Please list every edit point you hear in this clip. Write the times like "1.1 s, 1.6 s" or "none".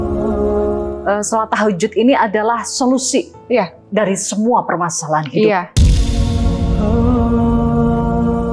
0.9 s